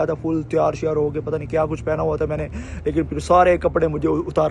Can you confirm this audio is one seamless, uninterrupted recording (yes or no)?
yes